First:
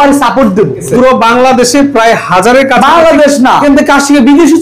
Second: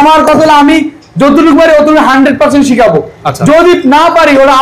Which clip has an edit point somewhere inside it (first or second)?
first